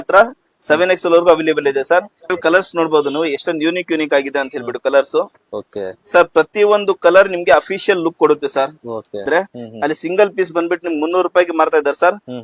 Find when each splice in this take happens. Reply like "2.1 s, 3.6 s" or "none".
2.4 s, 9.3 s